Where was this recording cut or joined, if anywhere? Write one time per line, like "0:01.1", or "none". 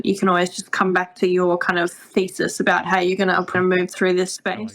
0:03.5